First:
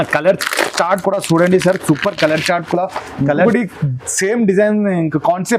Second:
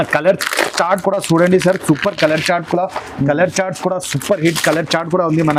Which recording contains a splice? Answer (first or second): first